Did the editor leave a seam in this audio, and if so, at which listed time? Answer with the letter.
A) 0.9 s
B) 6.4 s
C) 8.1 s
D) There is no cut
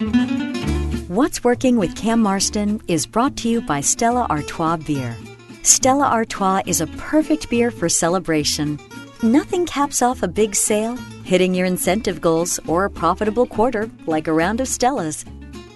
A